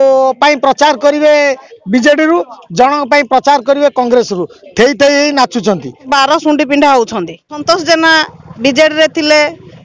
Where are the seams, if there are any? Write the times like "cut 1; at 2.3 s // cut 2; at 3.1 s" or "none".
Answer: cut 1; at 6.0 s // cut 2; at 7.6 s